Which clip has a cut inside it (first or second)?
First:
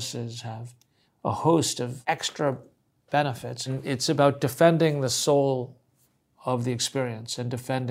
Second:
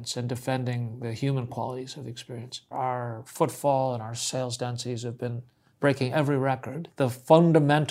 second